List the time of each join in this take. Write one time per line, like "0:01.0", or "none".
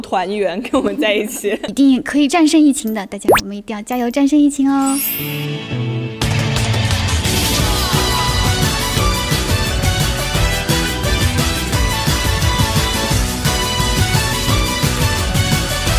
0:01.6
0:05.1